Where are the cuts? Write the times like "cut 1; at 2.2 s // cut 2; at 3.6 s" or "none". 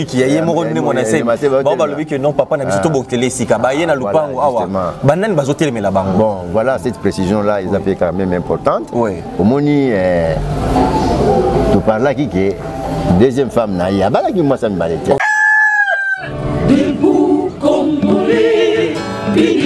cut 1; at 15.2 s